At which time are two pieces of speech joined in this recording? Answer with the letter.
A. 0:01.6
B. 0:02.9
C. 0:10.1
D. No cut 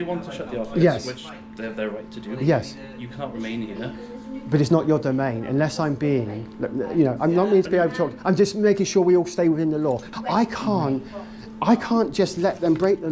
C